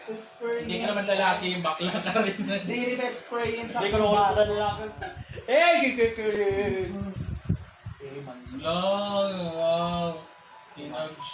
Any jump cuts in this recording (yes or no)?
yes